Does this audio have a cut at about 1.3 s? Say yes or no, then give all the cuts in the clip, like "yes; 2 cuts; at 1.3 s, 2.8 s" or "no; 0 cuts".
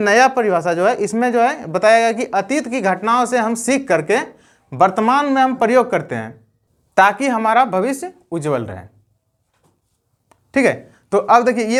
no; 0 cuts